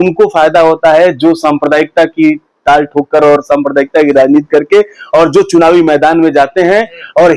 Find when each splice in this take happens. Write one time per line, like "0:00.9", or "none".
none